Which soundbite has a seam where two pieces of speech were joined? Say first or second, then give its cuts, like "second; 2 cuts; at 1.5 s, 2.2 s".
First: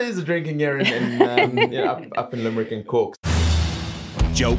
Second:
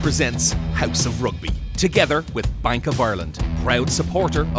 first; 1 cut; at 3.2 s